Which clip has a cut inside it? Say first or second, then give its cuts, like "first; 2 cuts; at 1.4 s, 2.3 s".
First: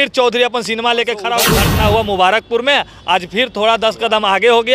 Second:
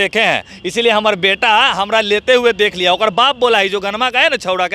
first; 1 cut; at 1.6 s